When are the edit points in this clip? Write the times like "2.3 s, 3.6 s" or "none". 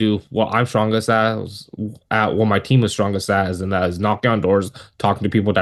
none

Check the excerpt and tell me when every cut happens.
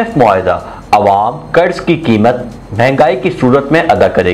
none

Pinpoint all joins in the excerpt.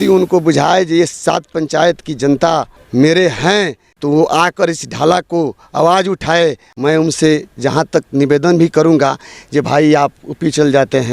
2.8 s, 3.9 s, 6.7 s

